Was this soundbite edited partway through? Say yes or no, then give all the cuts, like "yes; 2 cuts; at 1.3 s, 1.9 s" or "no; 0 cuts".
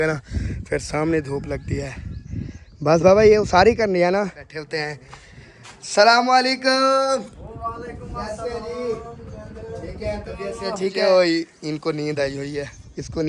yes; 2 cuts; at 4.5 s, 11.0 s